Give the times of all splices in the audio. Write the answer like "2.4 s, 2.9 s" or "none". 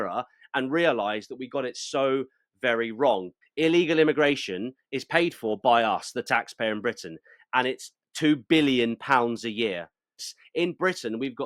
3.3 s, 10.2 s

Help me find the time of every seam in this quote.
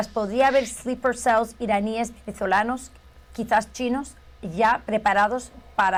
none

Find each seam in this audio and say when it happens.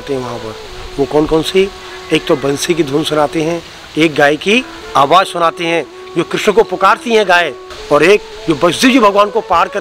7.7 s

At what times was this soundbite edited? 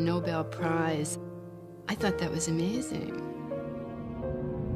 3.3 s

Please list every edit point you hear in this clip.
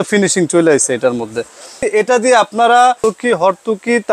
1.8 s, 3.0 s

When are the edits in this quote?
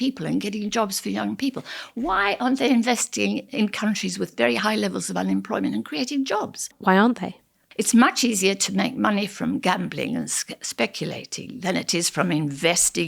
6.7 s, 7.6 s

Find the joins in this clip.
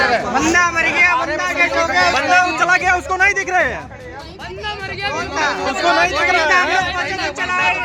none

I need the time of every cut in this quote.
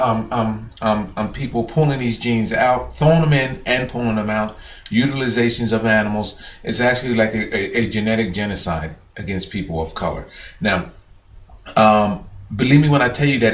none

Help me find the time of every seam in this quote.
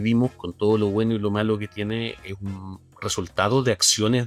none

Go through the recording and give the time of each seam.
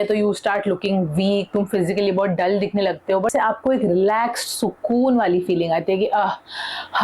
3.3 s

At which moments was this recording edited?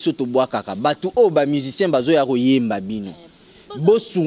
none

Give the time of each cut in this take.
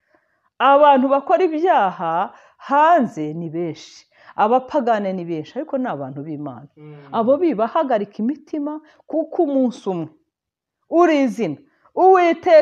none

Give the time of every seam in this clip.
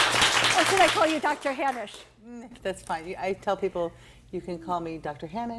4.5 s

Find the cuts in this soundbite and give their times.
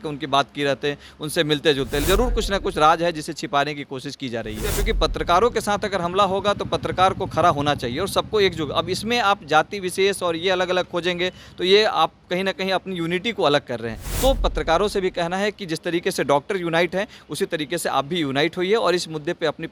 2.0 s, 4.7 s, 14.0 s

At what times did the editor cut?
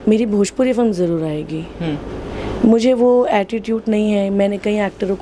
none

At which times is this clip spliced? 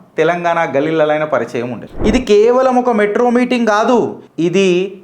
1.8 s

